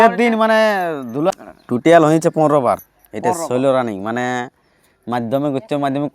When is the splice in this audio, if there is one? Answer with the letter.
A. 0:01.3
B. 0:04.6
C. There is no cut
A